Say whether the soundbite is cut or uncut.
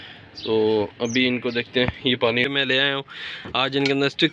cut